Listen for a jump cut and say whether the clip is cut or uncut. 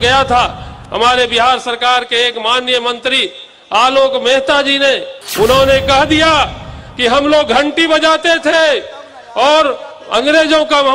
cut